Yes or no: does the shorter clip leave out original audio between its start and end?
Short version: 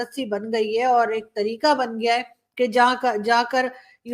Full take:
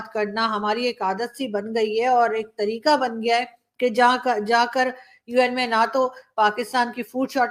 no